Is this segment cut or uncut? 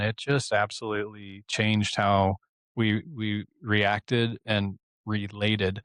uncut